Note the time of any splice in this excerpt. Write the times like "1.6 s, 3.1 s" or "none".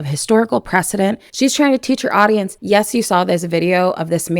1.3 s, 2.5 s